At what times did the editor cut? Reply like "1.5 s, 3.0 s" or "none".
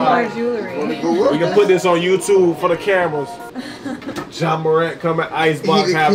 4.2 s